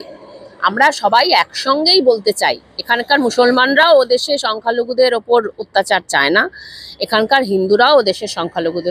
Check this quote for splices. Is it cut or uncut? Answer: uncut